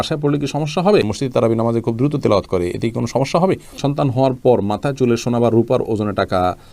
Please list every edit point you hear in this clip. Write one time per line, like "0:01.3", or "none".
0:01.1
0:03.7